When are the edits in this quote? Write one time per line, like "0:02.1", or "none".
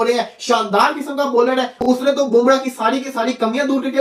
none